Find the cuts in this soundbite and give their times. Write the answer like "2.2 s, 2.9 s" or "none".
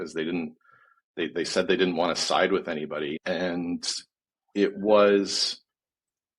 3.2 s